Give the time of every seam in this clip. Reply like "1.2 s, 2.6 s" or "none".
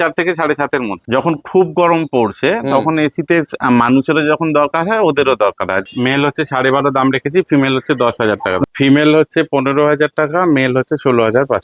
1.0 s, 5.9 s, 8.6 s